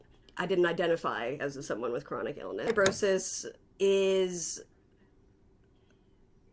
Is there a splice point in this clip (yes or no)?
yes